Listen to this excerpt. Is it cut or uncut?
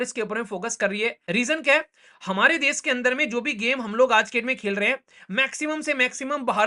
cut